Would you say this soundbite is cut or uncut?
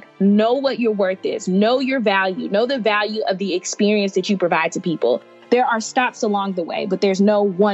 cut